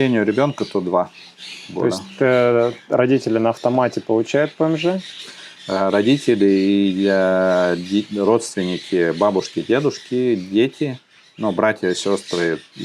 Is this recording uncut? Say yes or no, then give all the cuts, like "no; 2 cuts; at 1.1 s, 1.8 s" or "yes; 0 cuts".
yes; 0 cuts